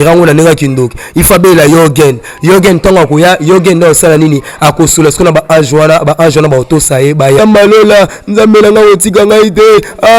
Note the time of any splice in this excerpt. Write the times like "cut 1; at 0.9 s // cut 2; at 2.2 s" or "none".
cut 1; at 7.4 s